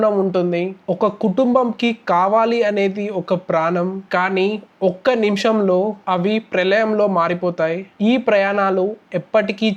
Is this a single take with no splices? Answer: yes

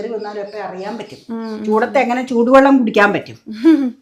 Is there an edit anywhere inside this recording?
yes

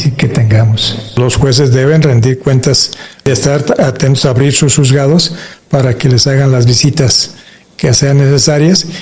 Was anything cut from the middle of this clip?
yes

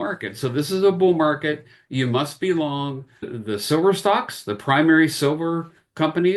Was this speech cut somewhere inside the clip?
yes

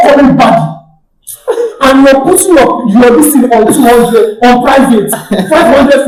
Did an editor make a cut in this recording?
no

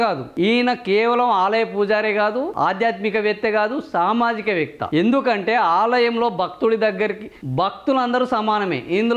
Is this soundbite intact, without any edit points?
yes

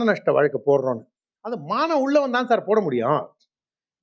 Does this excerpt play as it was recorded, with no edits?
yes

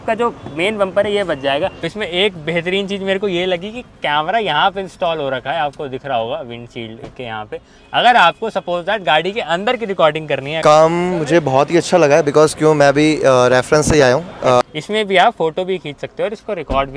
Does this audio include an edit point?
yes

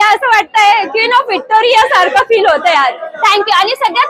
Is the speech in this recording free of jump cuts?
yes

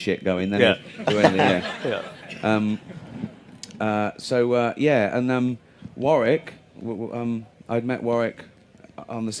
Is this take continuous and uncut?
yes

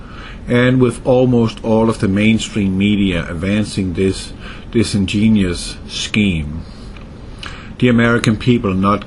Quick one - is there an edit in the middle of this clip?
yes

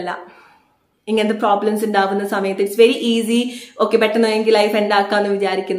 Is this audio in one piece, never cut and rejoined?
yes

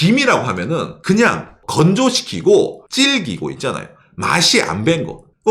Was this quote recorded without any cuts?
no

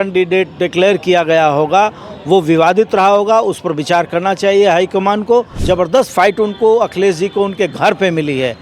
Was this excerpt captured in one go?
no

